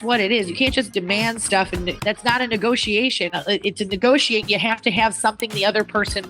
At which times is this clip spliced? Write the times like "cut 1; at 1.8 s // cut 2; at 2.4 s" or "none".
cut 1; at 2.0 s